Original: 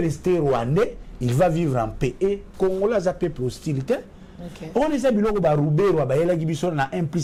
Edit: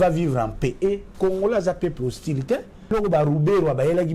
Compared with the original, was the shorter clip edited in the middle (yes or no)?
yes